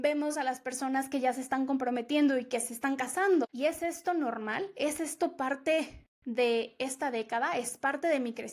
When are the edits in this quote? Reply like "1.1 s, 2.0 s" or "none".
3.5 s